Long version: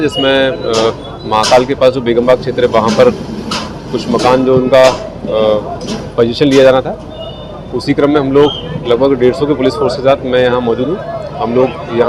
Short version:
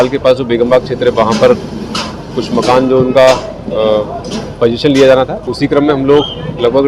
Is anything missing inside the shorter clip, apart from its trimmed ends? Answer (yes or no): yes